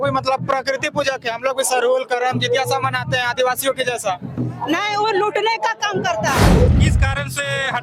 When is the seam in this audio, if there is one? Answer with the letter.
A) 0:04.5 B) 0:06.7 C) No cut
B